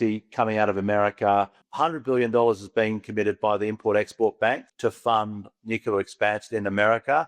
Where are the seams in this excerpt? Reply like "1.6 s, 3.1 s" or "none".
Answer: 1.6 s, 4.7 s